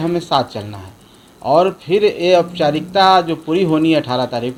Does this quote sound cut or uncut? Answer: uncut